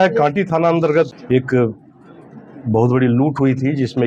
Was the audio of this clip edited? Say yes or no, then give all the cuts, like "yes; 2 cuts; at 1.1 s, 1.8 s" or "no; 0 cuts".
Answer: yes; 1 cut; at 0.9 s